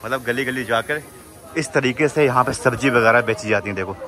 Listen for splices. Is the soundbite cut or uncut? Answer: uncut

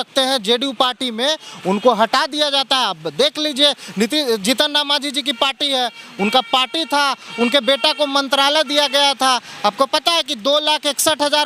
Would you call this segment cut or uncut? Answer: uncut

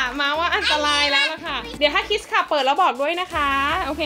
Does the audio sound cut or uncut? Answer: cut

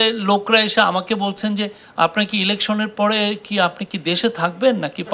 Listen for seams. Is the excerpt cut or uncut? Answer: uncut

